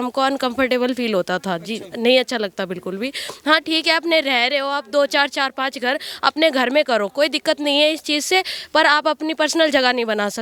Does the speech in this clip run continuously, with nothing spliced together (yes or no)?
yes